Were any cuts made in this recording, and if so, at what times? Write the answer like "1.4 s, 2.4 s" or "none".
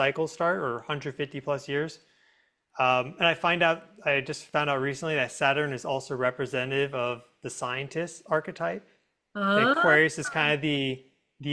none